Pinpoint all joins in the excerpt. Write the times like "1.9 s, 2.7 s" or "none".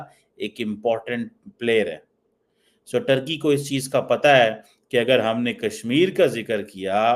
none